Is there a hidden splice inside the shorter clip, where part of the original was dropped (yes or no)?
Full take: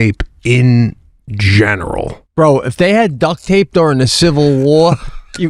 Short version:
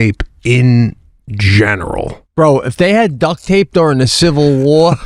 no